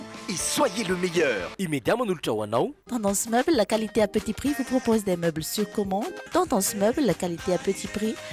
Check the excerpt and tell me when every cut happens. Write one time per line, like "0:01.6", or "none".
0:02.8